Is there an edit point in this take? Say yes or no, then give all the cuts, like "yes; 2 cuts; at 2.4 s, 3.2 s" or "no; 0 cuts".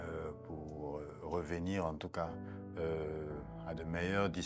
no; 0 cuts